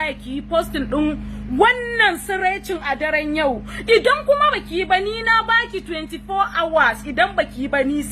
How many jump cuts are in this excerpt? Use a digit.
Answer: 0